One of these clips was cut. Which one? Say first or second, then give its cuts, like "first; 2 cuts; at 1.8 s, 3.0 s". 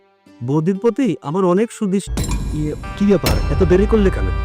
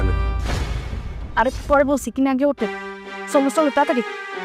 first; 1 cut; at 2.8 s